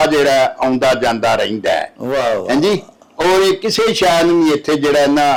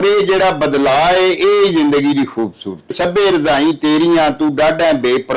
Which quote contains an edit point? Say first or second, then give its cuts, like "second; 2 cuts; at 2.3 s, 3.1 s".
second; 1 cut; at 2.9 s